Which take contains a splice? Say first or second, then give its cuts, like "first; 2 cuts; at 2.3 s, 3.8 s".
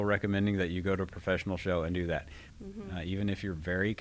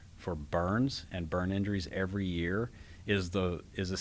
first; 1 cut; at 2.4 s